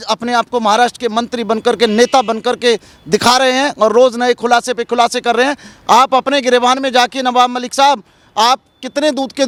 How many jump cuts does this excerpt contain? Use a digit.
0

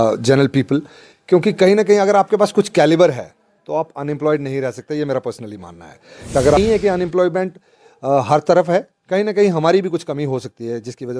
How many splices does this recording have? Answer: 1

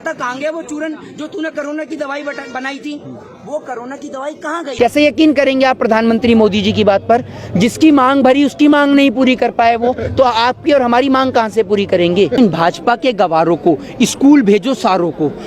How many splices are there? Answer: 2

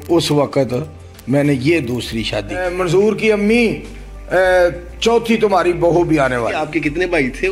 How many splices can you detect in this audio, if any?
2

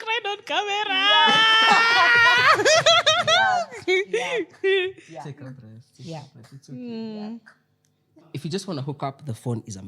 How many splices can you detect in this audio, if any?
1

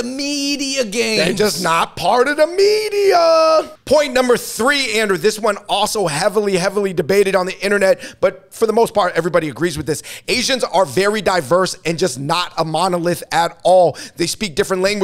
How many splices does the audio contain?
0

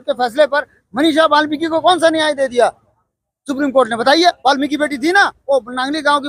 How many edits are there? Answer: 0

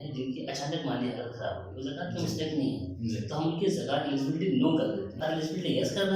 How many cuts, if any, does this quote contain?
1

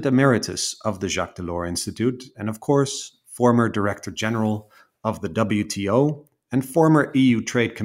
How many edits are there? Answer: 0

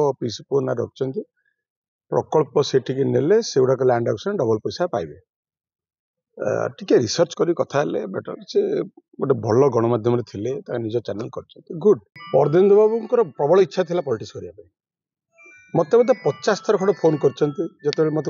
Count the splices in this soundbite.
1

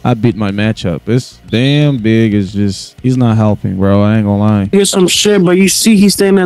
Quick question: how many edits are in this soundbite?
2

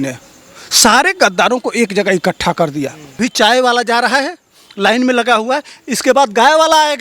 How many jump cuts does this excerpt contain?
1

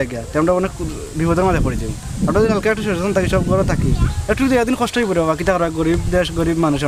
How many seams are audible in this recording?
0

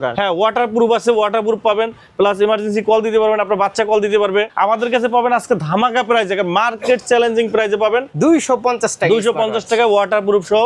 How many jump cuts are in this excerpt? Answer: 2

